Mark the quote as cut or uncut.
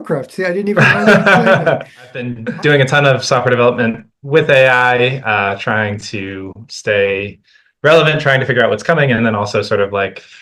cut